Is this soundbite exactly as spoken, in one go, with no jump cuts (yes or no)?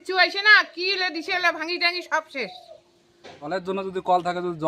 no